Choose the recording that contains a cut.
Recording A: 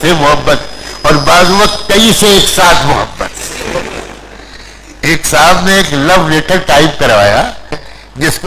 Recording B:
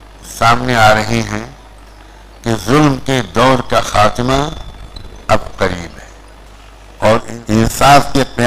B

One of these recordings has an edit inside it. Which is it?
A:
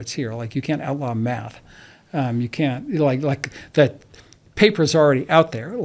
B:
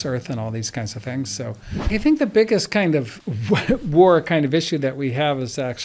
B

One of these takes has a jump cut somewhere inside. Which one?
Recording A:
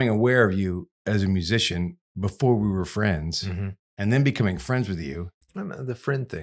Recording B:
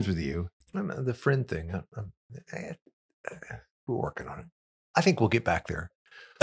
A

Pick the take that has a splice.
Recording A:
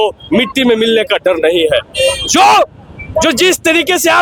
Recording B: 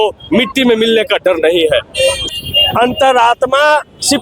B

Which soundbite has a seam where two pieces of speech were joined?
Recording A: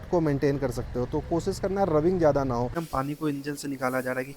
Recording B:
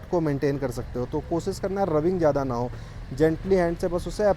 A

